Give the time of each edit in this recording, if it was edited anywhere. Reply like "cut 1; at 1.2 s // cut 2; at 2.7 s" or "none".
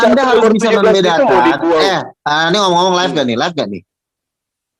none